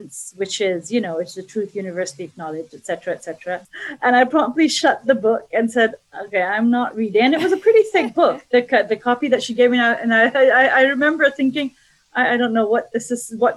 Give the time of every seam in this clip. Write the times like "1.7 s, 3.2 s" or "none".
none